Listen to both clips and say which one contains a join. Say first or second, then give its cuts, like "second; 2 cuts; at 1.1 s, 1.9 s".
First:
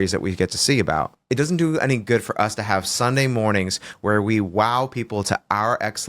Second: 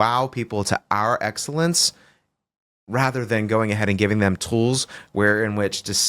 first; 1 cut; at 1.2 s